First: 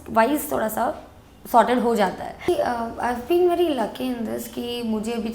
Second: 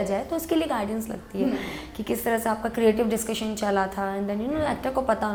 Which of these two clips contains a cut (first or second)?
first